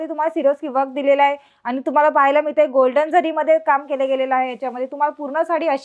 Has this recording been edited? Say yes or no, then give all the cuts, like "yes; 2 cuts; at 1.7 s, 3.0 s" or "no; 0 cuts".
no; 0 cuts